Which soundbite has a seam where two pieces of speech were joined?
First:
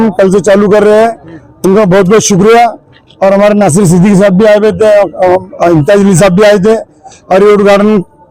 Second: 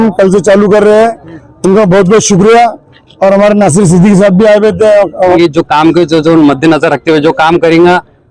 second; 1 cut; at 5.4 s

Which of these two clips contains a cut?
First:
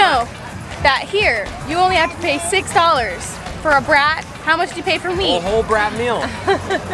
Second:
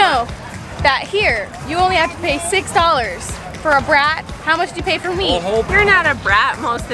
second; 1 cut; at 5.7 s

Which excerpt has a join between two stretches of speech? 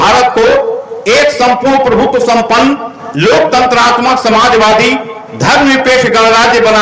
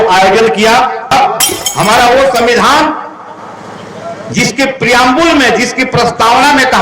second; 1 cut; at 1.1 s

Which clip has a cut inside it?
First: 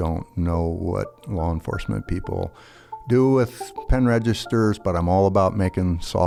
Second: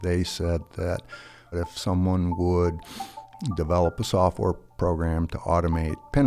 second; 1 cut; at 1.5 s

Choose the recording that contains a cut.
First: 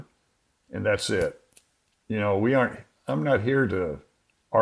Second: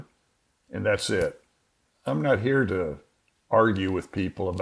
second; 1 cut; at 1.9 s

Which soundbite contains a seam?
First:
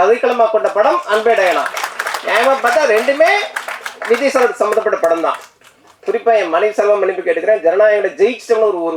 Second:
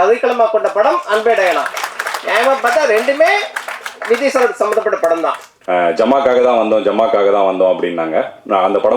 second; 1 cut; at 5.5 s

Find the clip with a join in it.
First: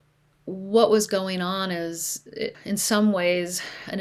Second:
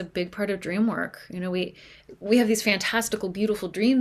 first; 1 cut; at 2.6 s

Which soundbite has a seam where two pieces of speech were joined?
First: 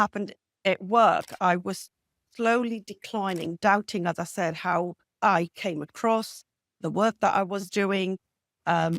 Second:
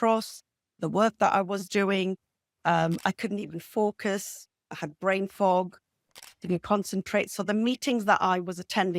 first; 1 cut; at 5.0 s

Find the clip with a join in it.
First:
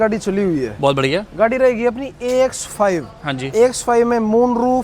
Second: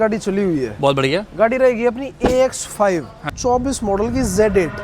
second; 1 cut; at 3.3 s

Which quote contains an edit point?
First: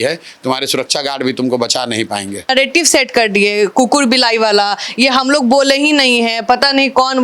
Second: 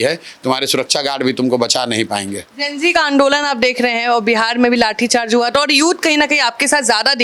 first; 1 cut; at 2.5 s

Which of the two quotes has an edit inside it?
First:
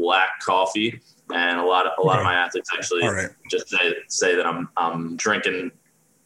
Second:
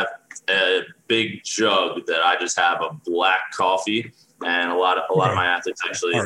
first; 1 cut; at 5.2 s

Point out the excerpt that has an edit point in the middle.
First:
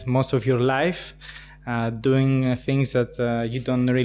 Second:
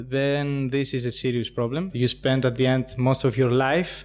second; 1 cut; at 1.9 s

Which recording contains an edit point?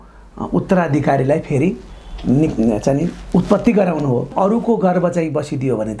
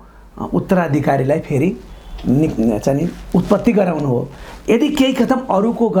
first; 1 cut; at 4.3 s

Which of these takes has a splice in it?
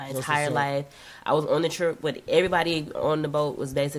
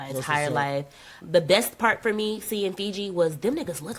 second; 1 cut; at 1.2 s

